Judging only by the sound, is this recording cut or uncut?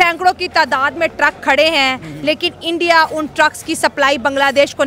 uncut